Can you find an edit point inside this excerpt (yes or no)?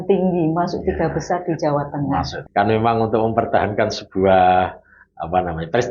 yes